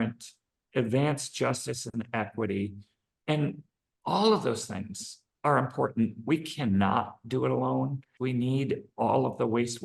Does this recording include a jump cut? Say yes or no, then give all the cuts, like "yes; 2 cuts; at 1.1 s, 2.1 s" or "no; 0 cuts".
yes; 1 cut; at 8.0 s